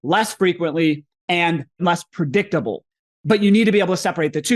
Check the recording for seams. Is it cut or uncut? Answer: cut